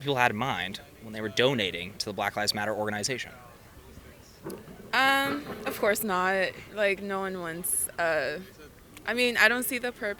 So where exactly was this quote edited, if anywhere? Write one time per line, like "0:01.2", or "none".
none